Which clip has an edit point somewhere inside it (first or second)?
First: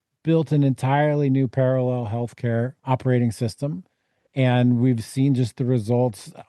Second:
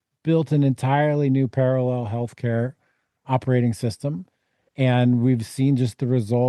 first